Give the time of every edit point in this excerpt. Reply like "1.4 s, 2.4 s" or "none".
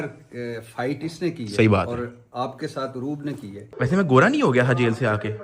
3.6 s

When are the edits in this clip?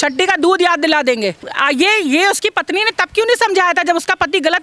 1.5 s

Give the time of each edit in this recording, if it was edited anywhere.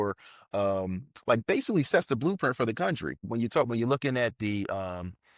3.2 s

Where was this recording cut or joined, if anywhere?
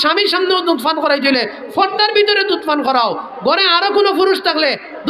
none

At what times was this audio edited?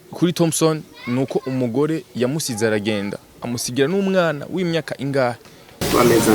none

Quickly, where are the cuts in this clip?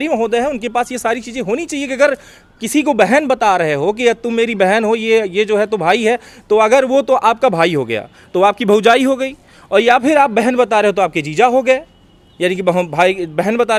none

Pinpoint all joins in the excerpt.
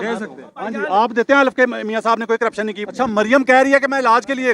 2.8 s

